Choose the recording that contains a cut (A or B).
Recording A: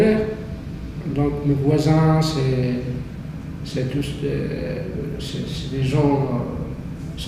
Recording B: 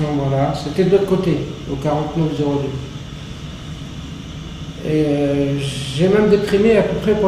B